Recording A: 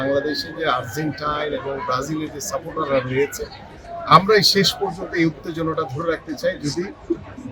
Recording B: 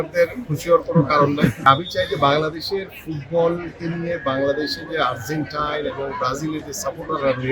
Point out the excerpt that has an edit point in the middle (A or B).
B